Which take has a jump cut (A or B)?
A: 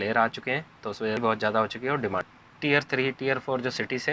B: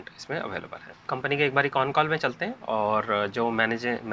A